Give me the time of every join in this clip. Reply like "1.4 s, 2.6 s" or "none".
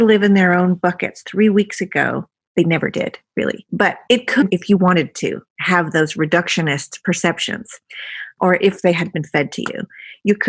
2.3 s, 8.3 s